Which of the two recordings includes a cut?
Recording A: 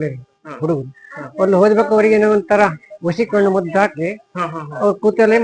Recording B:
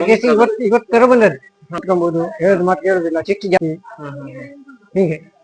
B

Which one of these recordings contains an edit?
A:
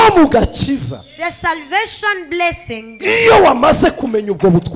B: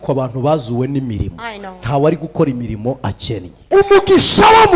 B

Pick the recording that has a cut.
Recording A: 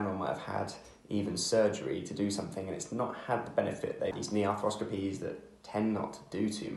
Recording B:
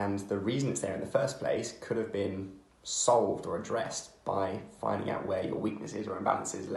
A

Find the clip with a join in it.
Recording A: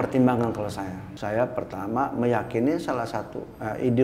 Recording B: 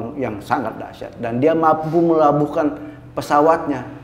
A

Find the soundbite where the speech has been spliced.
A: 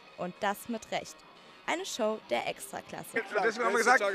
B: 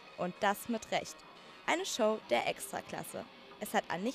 B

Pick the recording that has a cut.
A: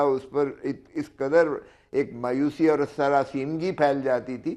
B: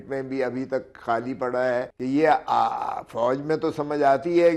B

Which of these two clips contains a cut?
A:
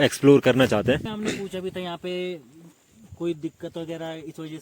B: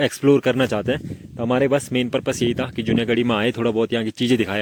A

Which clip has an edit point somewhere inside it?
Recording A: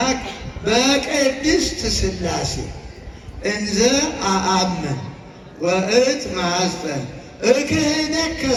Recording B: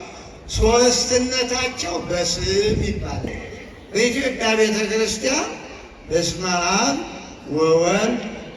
B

